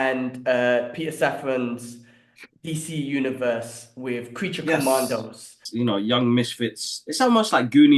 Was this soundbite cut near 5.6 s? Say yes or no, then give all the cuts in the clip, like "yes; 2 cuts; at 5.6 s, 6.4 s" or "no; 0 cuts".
yes; 1 cut; at 5.6 s